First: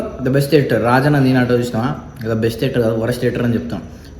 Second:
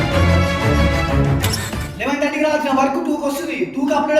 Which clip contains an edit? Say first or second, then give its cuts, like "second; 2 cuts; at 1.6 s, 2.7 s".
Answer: second; 1 cut; at 1.9 s